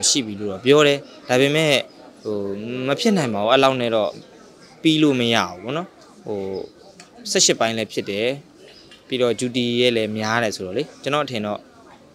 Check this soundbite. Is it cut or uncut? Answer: uncut